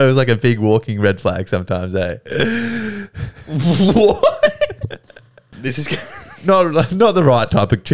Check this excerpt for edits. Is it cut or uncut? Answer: cut